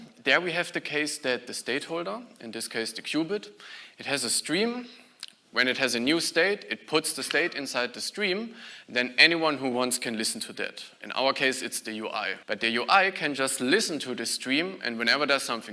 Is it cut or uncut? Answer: cut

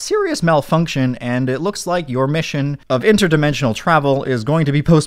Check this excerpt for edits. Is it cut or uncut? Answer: uncut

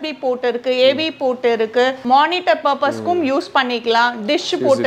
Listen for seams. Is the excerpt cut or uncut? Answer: cut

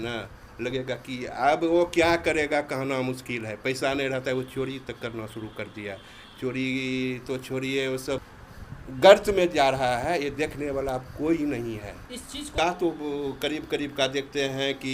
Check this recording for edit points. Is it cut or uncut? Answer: cut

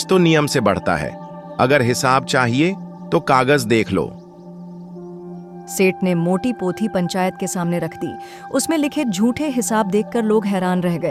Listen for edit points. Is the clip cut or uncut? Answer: uncut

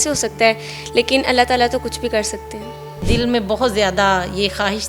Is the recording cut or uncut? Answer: cut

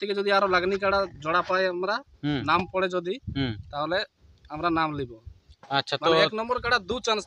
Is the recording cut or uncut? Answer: uncut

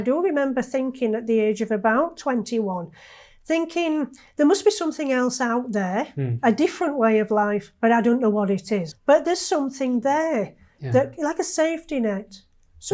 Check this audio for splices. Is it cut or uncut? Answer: cut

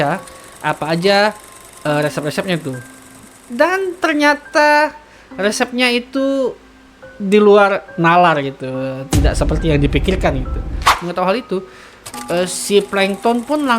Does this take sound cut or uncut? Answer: cut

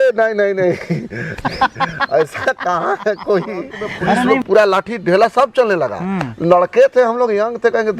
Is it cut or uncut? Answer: cut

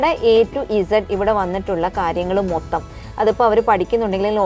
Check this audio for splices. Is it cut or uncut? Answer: uncut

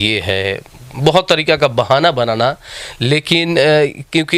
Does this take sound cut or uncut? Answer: uncut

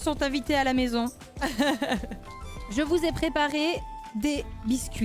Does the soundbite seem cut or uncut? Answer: uncut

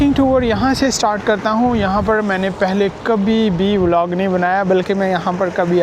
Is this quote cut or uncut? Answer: uncut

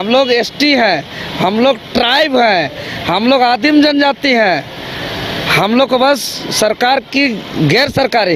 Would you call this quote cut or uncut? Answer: uncut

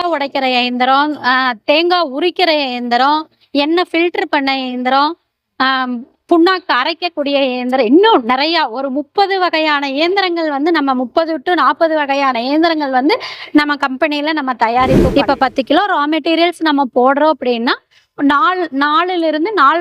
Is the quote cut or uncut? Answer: cut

